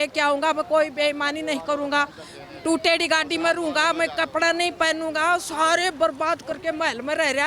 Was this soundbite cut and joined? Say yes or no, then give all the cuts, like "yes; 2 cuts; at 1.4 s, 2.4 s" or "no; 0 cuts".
no; 0 cuts